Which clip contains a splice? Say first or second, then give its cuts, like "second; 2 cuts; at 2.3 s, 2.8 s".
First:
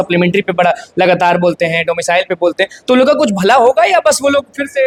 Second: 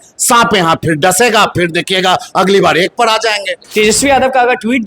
second; 1 cut; at 3.6 s